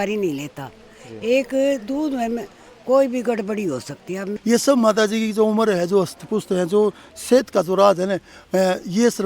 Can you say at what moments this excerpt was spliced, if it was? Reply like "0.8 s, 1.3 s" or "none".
4.3 s